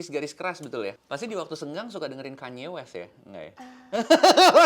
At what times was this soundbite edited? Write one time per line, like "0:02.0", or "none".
0:01.0